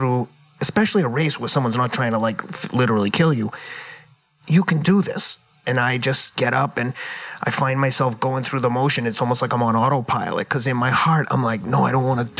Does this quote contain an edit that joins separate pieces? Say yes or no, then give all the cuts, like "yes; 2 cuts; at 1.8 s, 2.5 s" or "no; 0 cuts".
yes; 1 cut; at 6.3 s